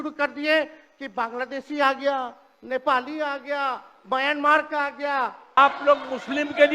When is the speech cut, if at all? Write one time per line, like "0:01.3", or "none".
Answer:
0:05.6